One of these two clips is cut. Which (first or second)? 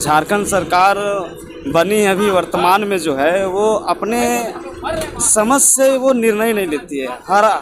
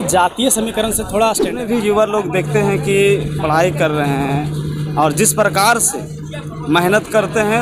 second